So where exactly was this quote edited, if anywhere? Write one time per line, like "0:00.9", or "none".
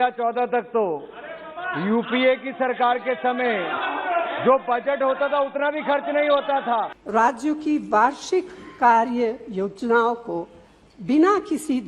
0:07.0